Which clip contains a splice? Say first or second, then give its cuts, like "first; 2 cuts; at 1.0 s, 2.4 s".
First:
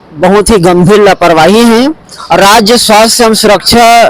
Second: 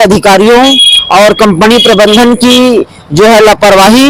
first; 1 cut; at 2.2 s